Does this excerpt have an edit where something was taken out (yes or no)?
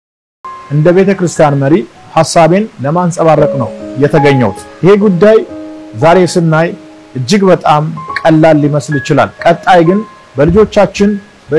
no